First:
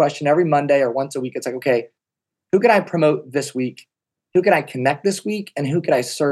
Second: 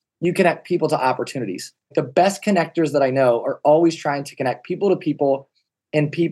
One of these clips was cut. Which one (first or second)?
second